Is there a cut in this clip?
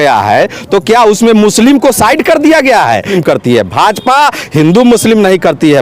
yes; 1 cut; at 3.1 s

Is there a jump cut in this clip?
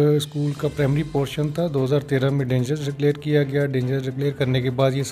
no; 0 cuts

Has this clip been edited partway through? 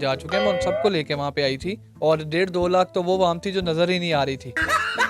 no; 0 cuts

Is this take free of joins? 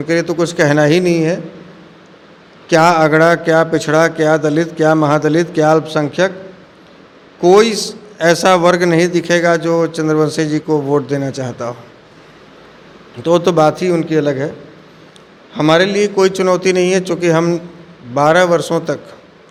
yes; 0 cuts

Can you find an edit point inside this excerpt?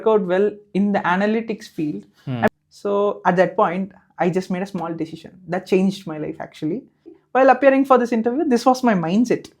yes; 2 cuts; at 2.5 s, 7.2 s

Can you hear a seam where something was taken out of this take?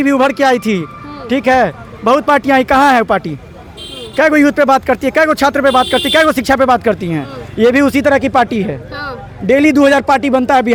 no; 0 cuts

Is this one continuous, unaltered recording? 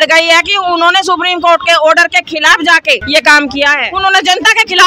no; 2 cuts; at 3.0 s, 3.9 s

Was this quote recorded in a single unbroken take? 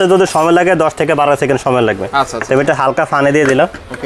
yes; 0 cuts

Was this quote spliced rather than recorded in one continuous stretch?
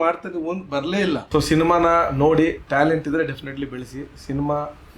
yes; 1 cut; at 1.2 s

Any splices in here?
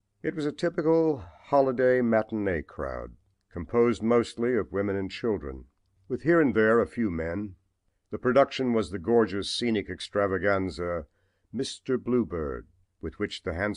yes; 1 cut; at 2.3 s

